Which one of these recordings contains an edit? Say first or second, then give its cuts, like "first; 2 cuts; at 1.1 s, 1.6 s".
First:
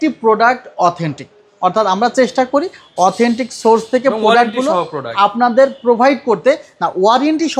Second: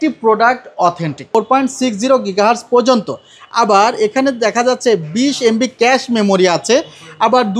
second; 1 cut; at 1.3 s